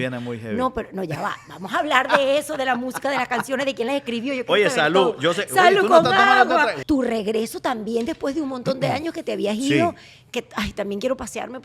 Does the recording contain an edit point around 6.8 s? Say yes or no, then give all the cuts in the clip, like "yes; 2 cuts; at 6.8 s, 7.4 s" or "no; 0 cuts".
yes; 1 cut; at 6.8 s